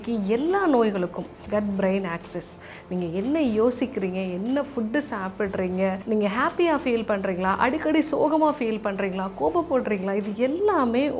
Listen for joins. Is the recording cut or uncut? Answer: cut